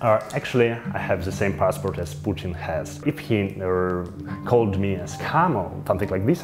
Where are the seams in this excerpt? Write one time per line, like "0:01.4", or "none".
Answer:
0:02.9